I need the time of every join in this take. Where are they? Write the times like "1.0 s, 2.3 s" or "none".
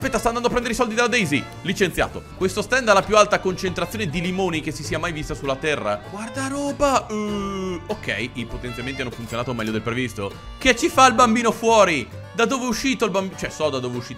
2.2 s, 6.1 s, 10.4 s

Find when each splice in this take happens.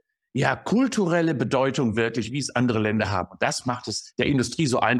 none

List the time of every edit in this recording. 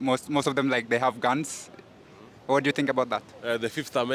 none

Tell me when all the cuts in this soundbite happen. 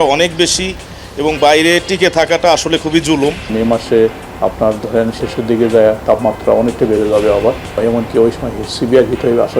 3.5 s

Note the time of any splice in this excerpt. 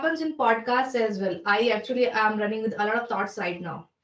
none

